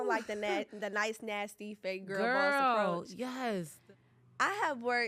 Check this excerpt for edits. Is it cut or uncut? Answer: cut